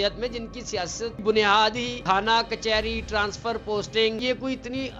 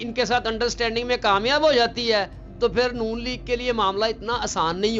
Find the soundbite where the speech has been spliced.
first; 3 cuts; at 1.2 s, 1.9 s, 4.2 s

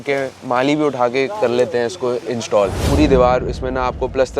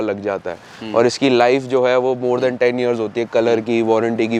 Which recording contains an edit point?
first; 1 cut; at 2.8 s

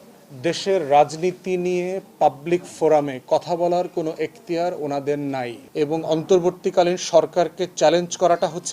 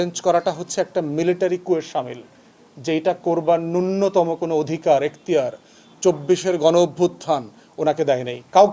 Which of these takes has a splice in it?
first; 1 cut; at 5.6 s

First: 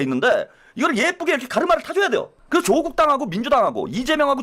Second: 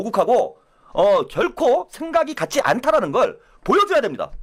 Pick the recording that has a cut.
first; 1 cut; at 2.3 s

